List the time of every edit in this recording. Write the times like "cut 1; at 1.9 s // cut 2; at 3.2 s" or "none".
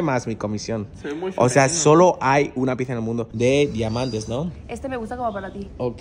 cut 1; at 3.3 s